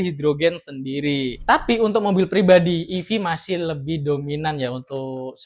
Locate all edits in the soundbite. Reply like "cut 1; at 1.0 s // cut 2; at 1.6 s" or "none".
cut 1; at 1.4 s